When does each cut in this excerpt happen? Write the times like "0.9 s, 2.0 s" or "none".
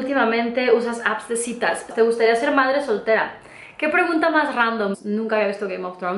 1.9 s, 5.0 s